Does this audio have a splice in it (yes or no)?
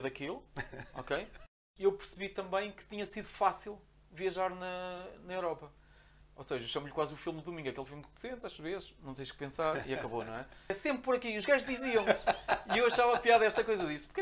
yes